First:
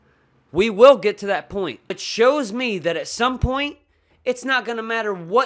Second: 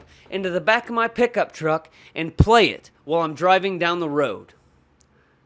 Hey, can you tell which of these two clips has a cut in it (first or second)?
first